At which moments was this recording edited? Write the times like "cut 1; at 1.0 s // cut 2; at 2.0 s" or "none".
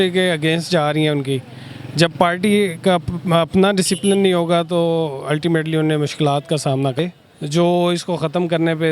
cut 1; at 7.0 s